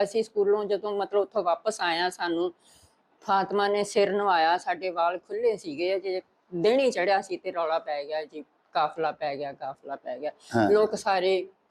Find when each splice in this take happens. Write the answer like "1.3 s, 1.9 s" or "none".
none